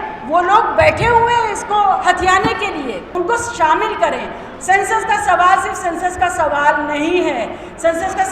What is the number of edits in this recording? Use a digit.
1